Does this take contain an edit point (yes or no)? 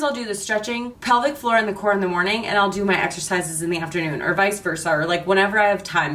yes